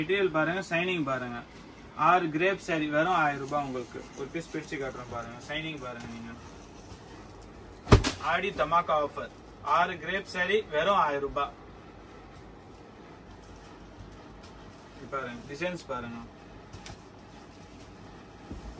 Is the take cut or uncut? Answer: uncut